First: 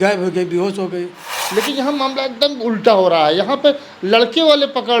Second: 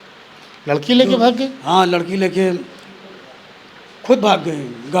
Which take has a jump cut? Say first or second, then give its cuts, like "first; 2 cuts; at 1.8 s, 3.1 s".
first; 1 cut; at 1.4 s